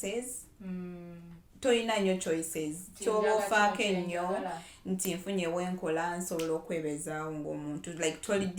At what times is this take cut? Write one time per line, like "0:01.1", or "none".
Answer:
none

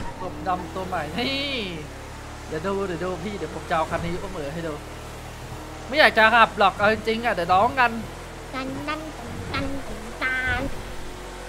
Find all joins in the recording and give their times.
none

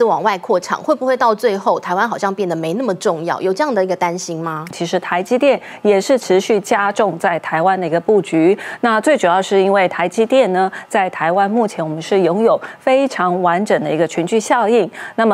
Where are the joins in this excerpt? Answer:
0:04.8

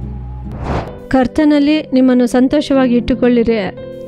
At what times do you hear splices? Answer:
0:01.0

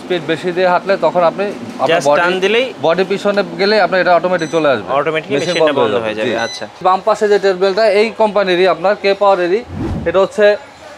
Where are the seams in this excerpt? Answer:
0:06.8

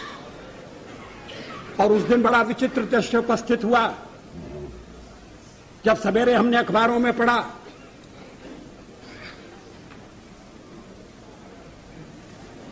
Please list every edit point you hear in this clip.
none

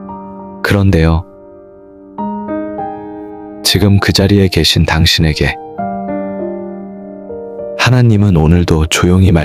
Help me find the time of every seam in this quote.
none

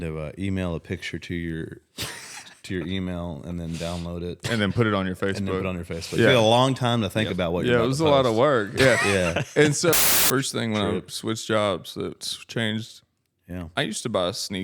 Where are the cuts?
0:09.9

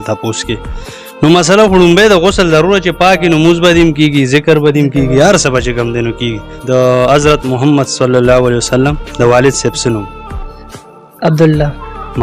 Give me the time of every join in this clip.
0:06.5

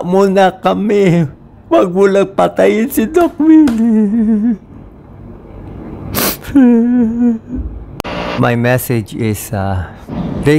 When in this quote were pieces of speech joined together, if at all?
0:08.0

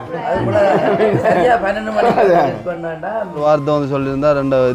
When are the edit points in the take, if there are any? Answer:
0:03.4

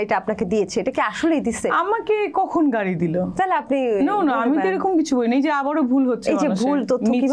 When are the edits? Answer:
none

